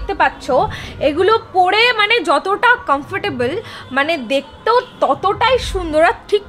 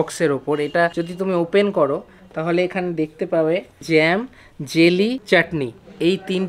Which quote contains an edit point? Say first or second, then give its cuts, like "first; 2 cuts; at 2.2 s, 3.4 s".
second; 3 cuts; at 1.0 s, 3.8 s, 5.2 s